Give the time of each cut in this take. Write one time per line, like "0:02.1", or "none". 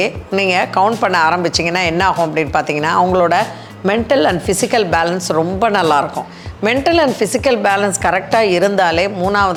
none